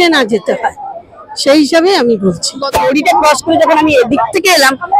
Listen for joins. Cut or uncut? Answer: cut